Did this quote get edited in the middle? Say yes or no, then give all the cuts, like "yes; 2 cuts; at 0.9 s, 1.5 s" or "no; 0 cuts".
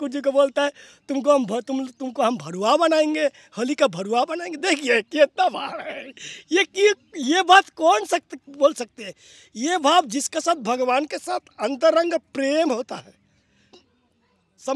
yes; 1 cut; at 13.7 s